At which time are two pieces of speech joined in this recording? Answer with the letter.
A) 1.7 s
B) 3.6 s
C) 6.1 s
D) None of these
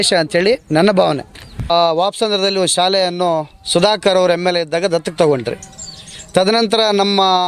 A